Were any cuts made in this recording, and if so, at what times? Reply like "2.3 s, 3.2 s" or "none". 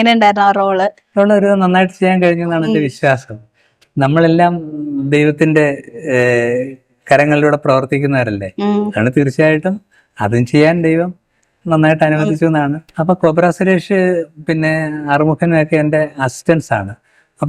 1.0 s, 12.9 s

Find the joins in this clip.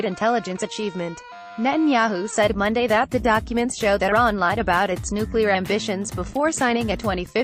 none

